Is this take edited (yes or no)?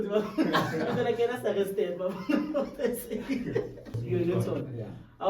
yes